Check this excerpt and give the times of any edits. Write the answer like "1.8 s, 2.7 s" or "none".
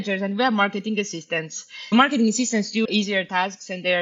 1.9 s, 2.8 s